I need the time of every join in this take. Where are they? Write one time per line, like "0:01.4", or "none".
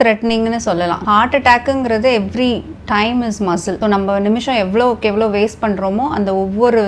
0:01.0
0:03.8